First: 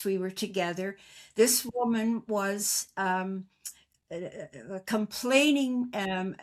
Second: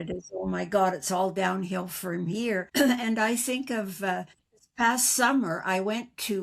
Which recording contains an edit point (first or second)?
second